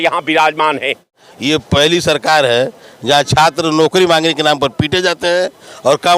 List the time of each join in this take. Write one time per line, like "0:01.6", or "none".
0:01.4